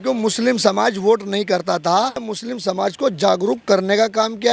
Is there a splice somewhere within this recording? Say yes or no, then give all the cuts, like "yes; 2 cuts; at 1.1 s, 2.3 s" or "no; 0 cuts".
yes; 1 cut; at 2.3 s